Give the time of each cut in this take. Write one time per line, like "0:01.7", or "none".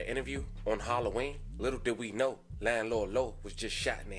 none

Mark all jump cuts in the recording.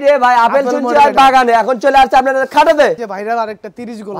0:03.0

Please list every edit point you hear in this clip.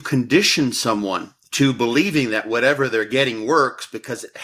0:01.3

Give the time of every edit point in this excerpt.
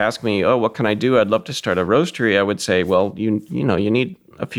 none

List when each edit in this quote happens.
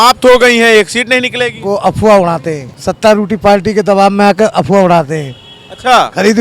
0:02.7

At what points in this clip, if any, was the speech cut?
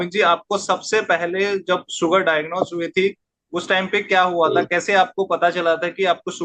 none

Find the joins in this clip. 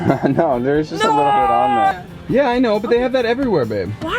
0:02.1

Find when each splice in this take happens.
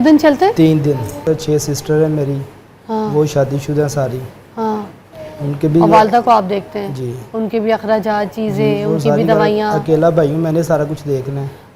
0:01.2

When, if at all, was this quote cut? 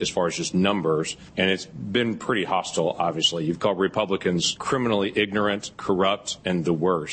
0:01.5
0:04.5
0:06.1

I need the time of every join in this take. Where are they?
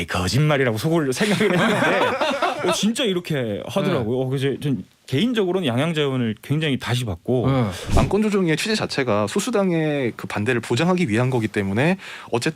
0:07.8

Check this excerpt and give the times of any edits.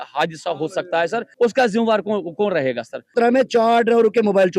0:01.3
0:03.0

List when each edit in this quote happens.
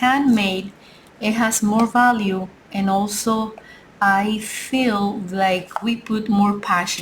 none

